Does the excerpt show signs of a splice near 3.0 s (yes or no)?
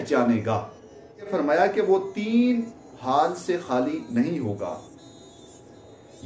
no